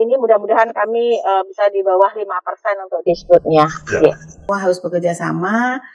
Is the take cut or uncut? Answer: cut